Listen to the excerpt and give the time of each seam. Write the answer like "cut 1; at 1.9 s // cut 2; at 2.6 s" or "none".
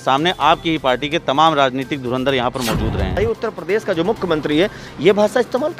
cut 1; at 3.1 s